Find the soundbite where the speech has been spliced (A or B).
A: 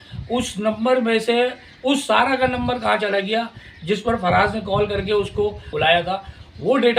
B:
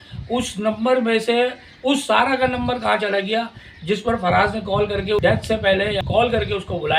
A